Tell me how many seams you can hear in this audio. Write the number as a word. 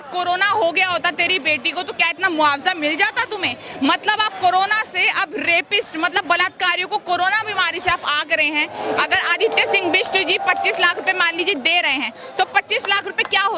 one